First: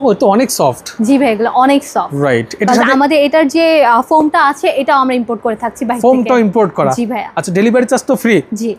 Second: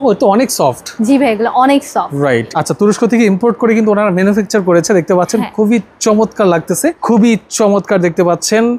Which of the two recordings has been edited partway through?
second; 2 cuts; at 2.5 s, 7.0 s

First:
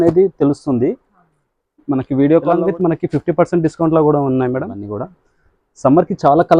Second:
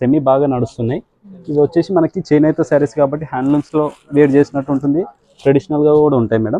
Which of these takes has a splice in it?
first; 2 cuts; at 2.6 s, 4.9 s

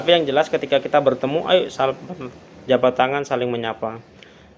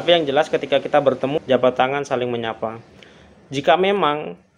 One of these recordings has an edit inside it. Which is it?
second; 1 cut; at 1.4 s

